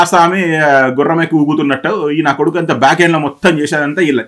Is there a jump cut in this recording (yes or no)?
no